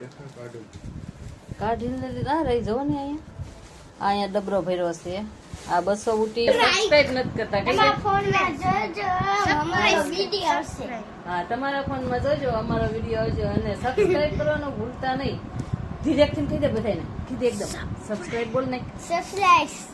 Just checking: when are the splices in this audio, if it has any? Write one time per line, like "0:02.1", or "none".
0:06.5